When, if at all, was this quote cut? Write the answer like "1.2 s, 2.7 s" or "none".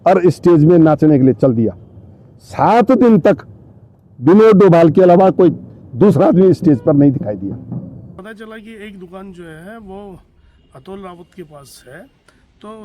8.2 s